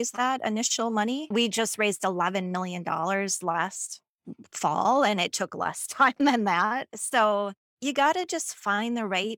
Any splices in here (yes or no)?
yes